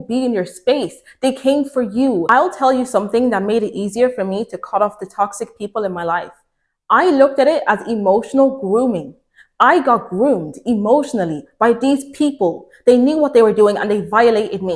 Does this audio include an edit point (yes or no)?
yes